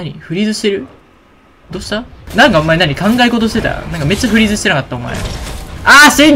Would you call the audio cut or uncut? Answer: cut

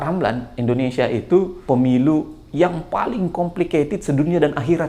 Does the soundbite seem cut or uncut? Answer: cut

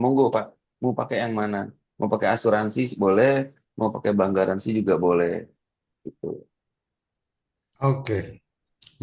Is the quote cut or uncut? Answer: uncut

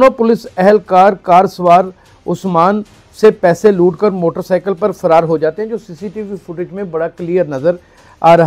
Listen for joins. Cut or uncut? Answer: uncut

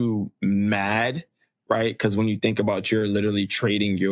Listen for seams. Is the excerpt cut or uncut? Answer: uncut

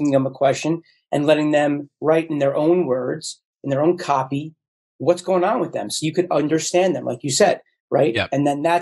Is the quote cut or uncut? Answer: uncut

